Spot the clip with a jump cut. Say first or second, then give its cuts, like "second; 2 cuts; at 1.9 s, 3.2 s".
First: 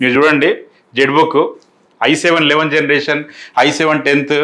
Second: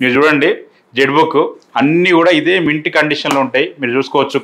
second; 1 cut; at 1.6 s